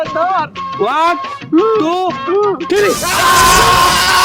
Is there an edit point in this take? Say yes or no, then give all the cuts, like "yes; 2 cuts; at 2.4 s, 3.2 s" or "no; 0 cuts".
no; 0 cuts